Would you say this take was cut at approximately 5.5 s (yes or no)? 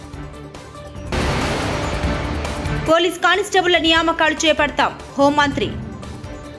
no